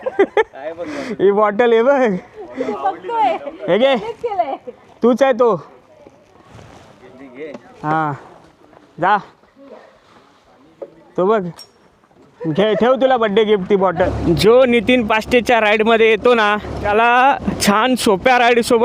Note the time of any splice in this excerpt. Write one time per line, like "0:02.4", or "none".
0:14.1
0:16.7
0:17.5